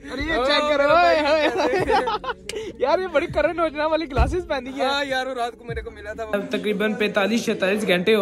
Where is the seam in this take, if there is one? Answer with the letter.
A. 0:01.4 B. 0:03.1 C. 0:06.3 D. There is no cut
C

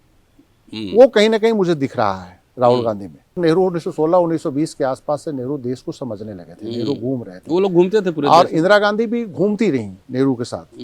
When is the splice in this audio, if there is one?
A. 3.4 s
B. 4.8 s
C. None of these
A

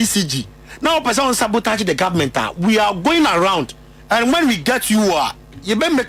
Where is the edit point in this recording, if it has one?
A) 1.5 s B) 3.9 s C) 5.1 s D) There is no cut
D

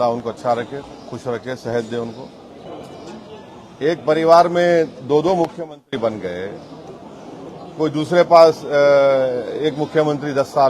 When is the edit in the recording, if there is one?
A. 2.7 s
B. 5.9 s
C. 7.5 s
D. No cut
A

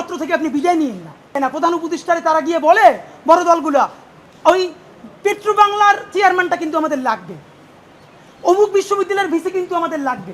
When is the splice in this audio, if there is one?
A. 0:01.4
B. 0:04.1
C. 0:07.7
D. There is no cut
A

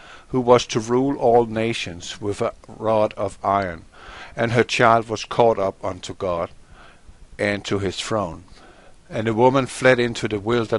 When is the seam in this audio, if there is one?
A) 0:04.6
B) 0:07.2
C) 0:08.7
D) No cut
D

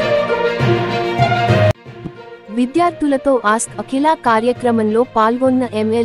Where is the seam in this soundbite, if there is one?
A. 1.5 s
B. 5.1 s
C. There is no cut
A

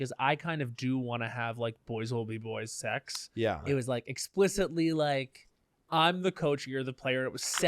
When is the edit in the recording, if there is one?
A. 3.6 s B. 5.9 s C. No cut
A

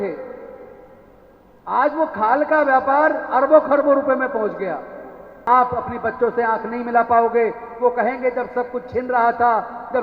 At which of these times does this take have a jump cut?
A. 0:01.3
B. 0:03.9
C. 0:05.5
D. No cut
C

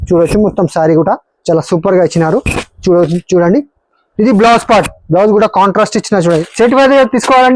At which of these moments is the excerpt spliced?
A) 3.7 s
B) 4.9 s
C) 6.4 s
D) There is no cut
C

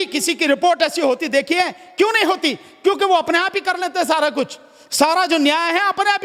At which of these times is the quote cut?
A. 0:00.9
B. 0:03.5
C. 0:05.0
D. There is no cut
D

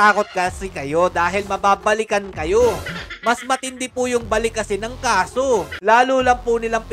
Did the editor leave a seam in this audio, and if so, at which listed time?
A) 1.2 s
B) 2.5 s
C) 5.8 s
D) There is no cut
C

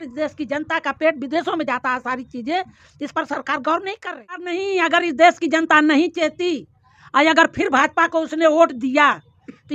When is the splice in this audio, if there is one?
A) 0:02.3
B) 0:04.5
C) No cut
B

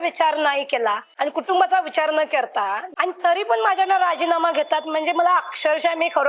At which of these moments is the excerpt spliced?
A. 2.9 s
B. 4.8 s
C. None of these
A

